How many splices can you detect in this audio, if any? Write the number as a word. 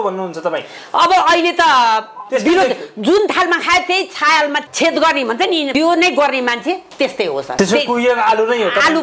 three